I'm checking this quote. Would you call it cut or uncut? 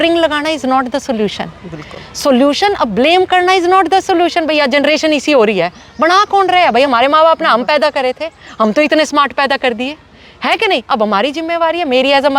uncut